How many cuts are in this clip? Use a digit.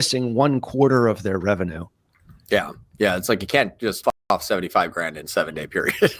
1